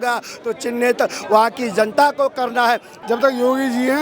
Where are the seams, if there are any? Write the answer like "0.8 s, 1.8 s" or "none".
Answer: 2.9 s